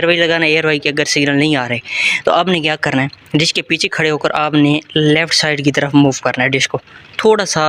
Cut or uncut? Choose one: uncut